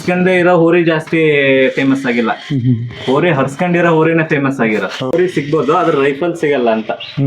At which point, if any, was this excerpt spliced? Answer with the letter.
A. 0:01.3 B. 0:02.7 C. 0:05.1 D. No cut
C